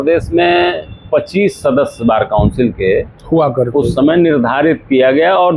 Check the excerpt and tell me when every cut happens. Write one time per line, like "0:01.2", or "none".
none